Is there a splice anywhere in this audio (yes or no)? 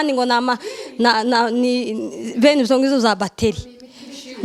no